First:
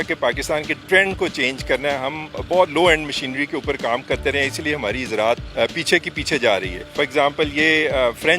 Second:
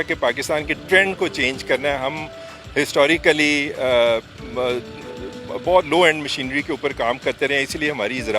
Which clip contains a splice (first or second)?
first